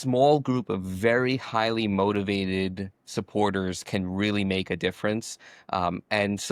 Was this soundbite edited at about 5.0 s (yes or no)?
no